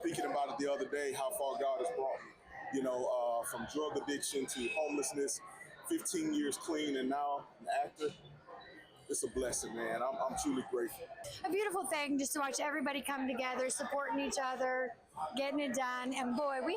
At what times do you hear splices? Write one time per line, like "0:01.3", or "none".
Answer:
0:11.2